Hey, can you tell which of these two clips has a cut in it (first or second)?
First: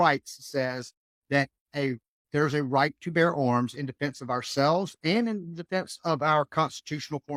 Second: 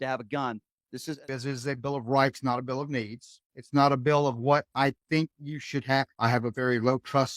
second